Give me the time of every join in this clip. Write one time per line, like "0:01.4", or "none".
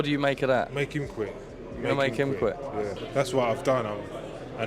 0:03.0